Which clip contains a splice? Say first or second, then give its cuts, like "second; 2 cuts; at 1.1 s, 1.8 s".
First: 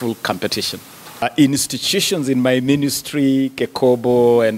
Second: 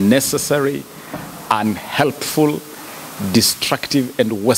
first; 1 cut; at 1.2 s